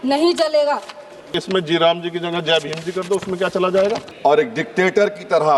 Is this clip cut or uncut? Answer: cut